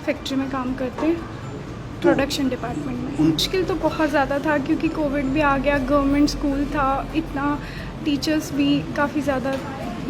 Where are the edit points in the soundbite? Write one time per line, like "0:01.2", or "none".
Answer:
0:03.4